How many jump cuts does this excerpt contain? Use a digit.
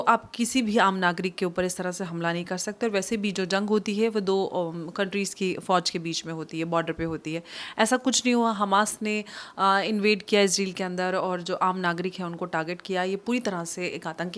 0